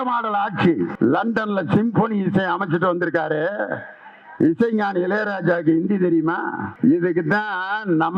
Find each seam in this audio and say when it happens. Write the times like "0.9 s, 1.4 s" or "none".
0.9 s, 6.7 s